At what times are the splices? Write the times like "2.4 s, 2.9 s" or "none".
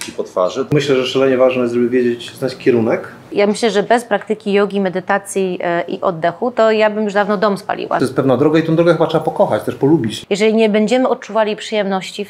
0.7 s, 3.3 s, 8.0 s, 10.2 s